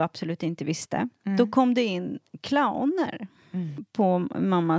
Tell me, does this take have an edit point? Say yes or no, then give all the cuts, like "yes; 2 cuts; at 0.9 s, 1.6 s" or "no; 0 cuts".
yes; 1 cut; at 3.8 s